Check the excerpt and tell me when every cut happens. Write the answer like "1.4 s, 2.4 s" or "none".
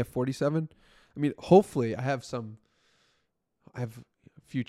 none